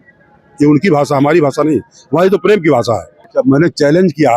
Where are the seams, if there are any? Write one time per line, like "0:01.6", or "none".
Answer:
0:03.3